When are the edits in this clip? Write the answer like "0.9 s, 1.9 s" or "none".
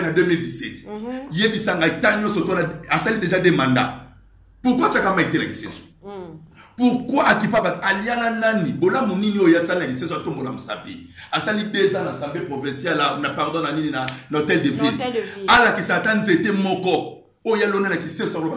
none